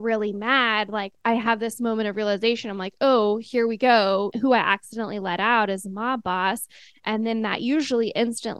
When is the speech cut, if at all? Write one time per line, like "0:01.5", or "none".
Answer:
0:01.1
0:04.3